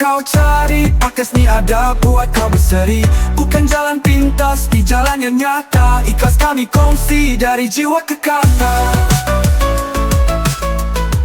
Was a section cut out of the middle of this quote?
no; 0 cuts

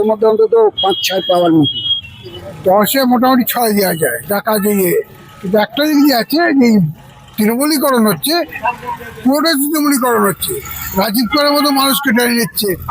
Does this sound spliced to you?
yes; 2 cuts; at 2.4 s, 8.5 s

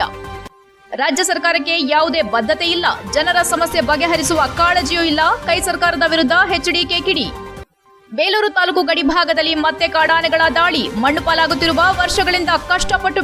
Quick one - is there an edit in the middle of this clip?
no; 0 cuts

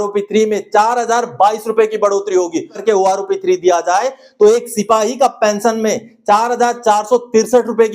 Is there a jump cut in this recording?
yes; 1 cut; at 2.8 s

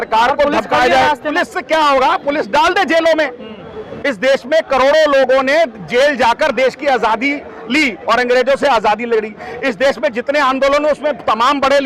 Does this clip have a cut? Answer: yes; 1 cut; at 1.4 s

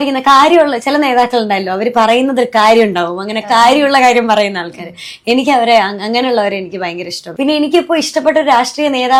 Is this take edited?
no; 0 cuts

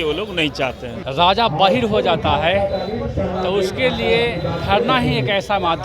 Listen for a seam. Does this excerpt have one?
yes; 1 cut; at 1.0 s

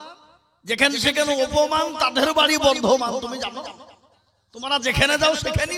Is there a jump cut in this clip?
no; 0 cuts

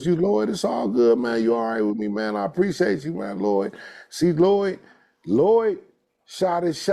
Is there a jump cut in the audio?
no; 0 cuts

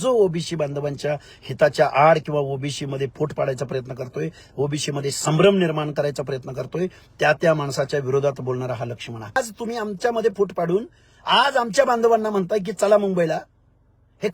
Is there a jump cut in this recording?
yes; 1 cut; at 9.4 s

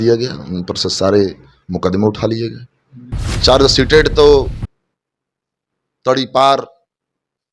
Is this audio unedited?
yes; 0 cuts

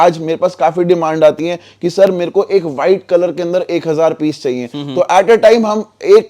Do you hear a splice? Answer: no; 0 cuts

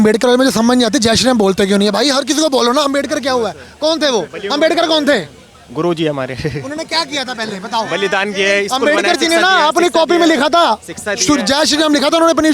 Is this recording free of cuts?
yes; 0 cuts

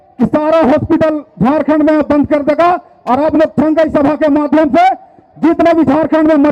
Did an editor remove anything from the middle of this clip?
no; 0 cuts

